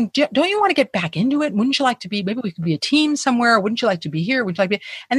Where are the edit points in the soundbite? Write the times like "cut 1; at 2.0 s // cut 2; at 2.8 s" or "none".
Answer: none